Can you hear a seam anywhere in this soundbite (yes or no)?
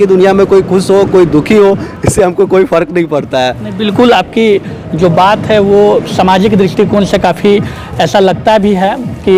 no